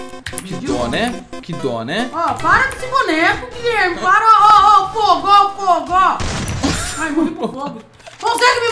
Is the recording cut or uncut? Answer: uncut